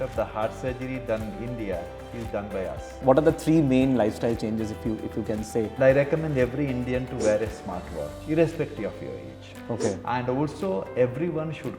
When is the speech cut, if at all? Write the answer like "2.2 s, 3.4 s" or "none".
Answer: 3.0 s, 5.7 s, 9.5 s